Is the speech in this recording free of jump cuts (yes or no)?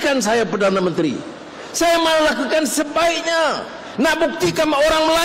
yes